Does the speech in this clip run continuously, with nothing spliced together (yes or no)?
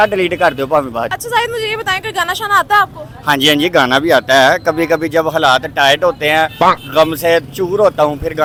yes